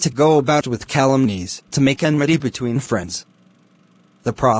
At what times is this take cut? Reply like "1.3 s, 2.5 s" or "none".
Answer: none